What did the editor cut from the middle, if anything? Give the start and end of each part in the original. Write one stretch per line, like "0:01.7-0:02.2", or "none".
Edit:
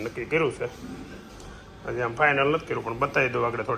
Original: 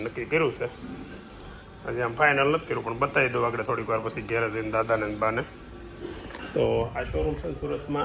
none